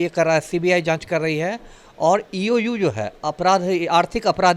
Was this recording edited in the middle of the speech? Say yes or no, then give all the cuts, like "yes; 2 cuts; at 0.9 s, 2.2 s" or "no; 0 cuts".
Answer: no; 0 cuts